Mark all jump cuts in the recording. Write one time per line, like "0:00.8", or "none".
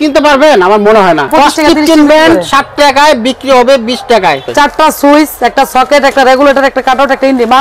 0:01.3
0:04.5